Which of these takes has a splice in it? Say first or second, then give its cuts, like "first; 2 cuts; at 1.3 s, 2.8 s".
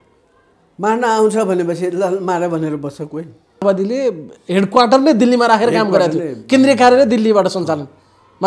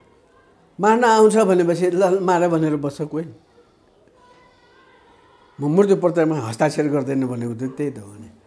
first; 1 cut; at 3.6 s